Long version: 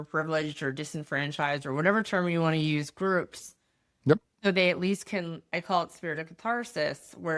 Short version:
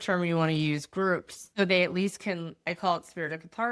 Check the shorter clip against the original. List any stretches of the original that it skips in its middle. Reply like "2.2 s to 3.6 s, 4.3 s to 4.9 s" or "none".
3.5 s to 4.3 s

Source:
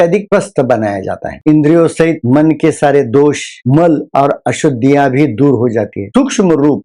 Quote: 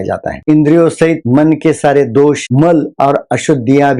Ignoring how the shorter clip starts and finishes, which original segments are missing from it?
3.4 s to 3.6 s

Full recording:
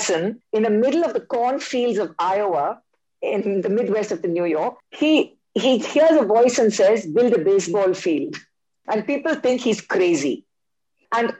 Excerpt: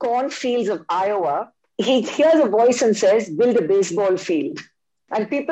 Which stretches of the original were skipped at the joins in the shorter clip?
2.9 s to 5.4 s

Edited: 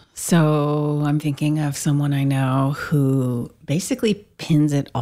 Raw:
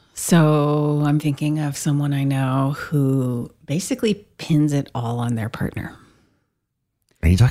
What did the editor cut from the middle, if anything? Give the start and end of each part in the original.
none

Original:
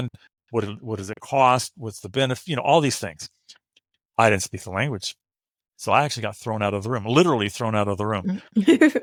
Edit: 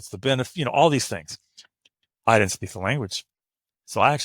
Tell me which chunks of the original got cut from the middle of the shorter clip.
none

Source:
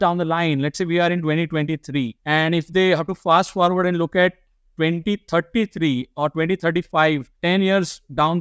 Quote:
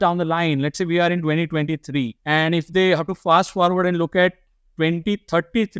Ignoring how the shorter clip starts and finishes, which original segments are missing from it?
none

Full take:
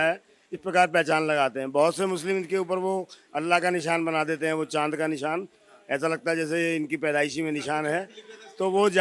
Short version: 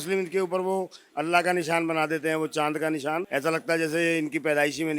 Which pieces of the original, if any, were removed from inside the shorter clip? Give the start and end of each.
5.4 s to 5.8 s

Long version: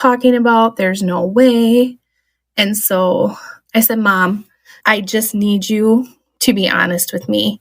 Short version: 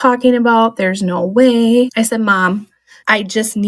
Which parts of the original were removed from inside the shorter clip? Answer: 1.9 s to 3.7 s

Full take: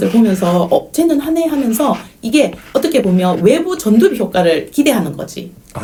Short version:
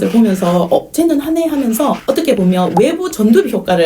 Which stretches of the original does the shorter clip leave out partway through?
2.0 s to 2.7 s

